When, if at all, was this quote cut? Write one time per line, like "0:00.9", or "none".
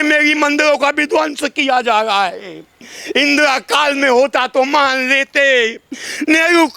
none